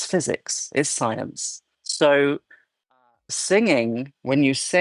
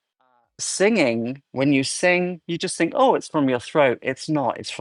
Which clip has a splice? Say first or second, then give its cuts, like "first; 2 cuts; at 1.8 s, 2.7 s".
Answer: first; 1 cut; at 1.3 s